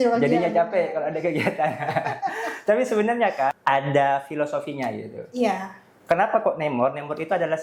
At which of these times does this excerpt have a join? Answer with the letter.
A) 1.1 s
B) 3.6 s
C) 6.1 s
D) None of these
B